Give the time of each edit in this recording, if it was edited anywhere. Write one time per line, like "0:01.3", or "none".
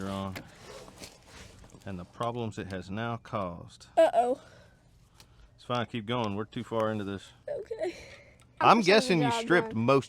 0:08.4